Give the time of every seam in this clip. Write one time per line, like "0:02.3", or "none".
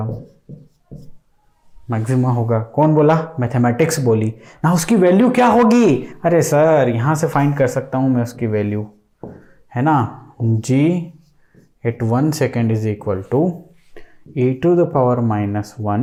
none